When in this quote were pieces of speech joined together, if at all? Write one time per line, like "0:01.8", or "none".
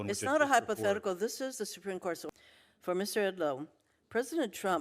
0:02.2